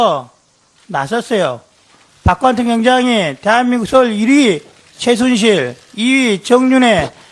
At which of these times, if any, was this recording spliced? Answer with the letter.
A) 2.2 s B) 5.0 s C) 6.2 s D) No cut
C